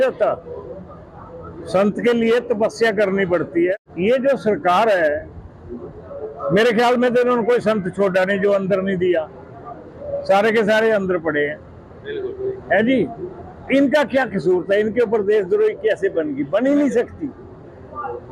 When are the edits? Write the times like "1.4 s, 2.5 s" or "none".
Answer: 3.8 s